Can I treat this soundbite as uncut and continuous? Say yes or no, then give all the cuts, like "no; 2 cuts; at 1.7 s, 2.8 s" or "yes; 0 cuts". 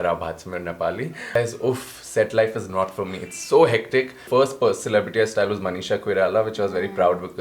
no; 2 cuts; at 1.4 s, 4.2 s